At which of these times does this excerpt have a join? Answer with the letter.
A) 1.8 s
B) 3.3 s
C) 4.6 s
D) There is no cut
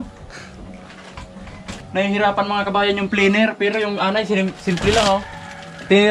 A